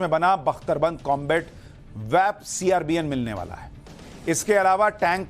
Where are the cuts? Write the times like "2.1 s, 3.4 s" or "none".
2.5 s